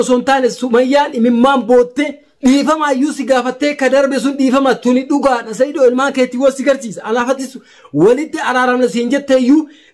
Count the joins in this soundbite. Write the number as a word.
one